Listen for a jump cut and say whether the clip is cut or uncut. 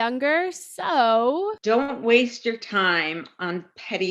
cut